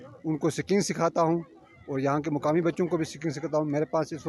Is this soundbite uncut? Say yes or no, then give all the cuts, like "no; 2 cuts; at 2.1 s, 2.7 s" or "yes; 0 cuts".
yes; 0 cuts